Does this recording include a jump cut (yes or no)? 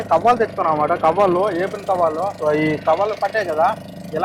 no